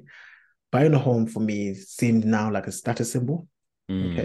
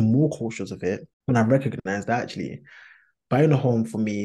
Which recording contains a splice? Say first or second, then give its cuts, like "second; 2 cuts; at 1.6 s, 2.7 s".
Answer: second; 1 cut; at 1.1 s